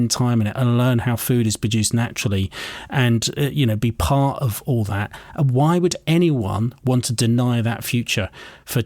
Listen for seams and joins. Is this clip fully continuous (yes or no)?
yes